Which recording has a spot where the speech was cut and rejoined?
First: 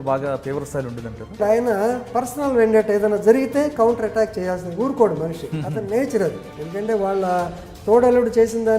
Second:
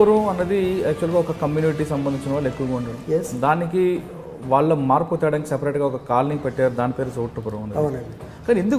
first; 2 cuts; at 1.4 s, 6.4 s

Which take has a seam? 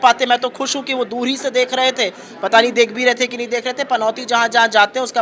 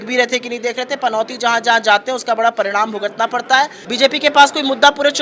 second; 1 cut; at 3.8 s

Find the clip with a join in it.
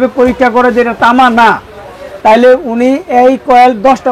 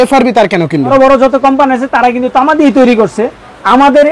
second; 1 cut; at 0.9 s

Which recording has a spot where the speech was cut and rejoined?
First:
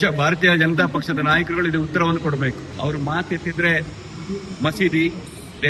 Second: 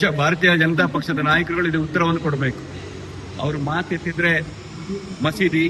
first; 1 cut; at 2.7 s

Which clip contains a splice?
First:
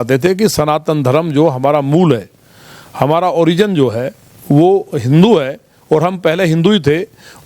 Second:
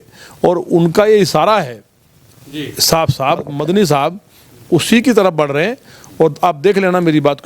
second; 1 cut; at 3.5 s

